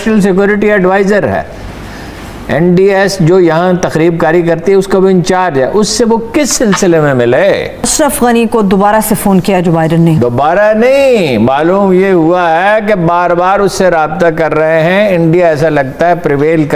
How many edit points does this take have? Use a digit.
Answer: 1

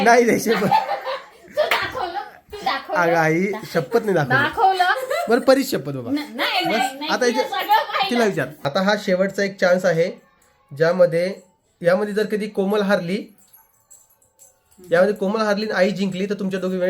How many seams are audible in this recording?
1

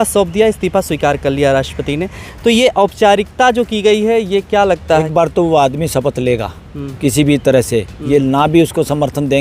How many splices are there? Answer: 1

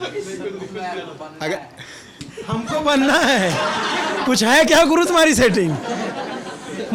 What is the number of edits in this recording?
0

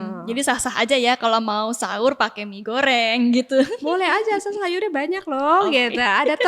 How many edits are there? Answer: 0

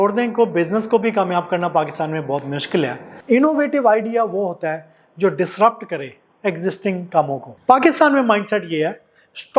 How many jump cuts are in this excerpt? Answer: 2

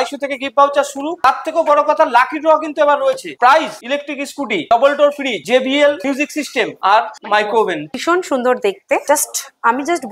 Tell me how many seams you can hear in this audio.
4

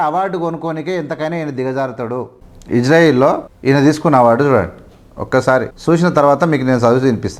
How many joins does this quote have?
3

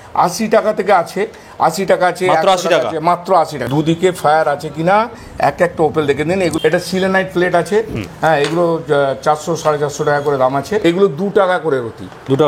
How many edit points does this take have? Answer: 3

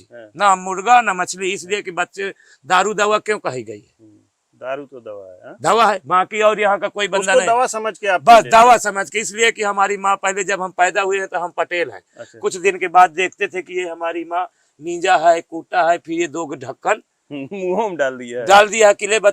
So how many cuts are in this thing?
0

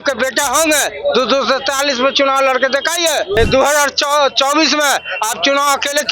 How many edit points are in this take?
1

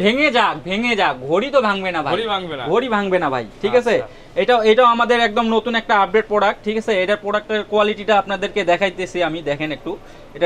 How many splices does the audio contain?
0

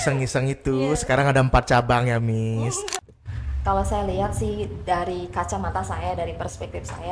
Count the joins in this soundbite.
1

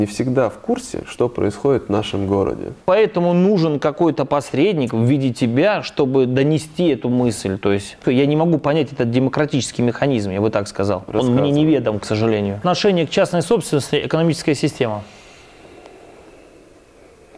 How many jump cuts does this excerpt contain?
3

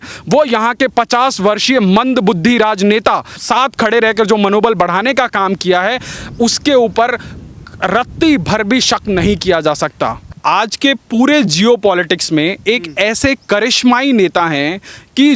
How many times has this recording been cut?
2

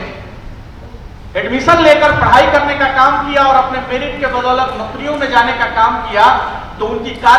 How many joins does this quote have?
0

